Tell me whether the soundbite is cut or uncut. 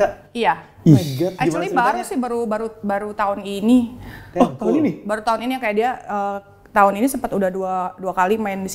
uncut